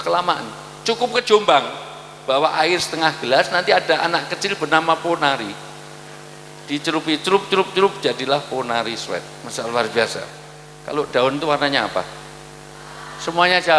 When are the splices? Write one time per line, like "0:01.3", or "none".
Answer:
0:11.1